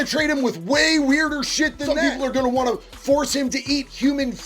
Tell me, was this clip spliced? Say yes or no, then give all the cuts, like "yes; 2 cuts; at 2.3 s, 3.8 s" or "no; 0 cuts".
yes; 1 cut; at 2.0 s